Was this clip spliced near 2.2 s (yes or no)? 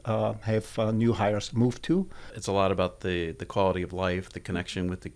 yes